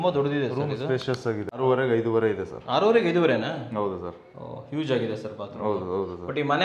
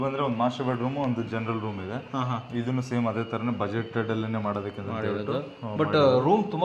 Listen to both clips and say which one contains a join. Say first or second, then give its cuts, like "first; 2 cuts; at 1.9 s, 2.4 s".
first; 1 cut; at 1.6 s